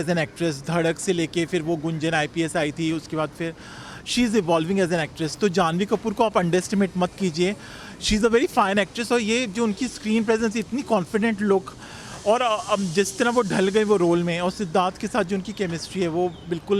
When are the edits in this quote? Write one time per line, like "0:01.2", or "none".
none